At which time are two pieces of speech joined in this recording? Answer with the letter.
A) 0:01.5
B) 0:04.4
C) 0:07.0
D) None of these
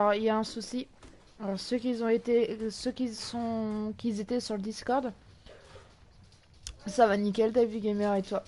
C